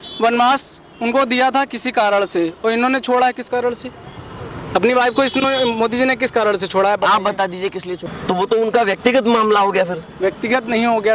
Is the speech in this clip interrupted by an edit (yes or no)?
yes